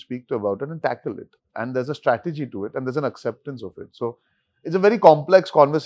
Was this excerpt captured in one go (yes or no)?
yes